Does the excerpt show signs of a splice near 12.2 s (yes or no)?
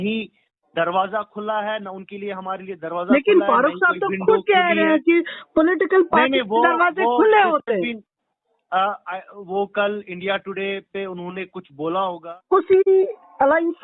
yes